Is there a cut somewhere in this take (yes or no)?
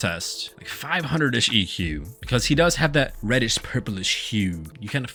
no